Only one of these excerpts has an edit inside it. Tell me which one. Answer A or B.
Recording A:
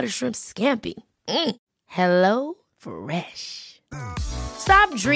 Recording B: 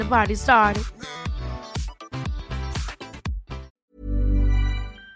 B